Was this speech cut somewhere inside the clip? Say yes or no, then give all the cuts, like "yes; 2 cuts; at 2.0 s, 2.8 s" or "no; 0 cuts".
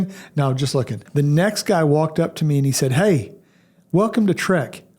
yes; 1 cut; at 1.0 s